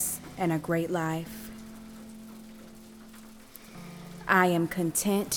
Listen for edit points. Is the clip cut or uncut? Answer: cut